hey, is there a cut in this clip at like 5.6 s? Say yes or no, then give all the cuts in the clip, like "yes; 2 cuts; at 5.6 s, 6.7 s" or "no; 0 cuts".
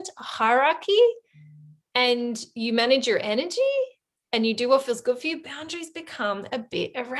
no; 0 cuts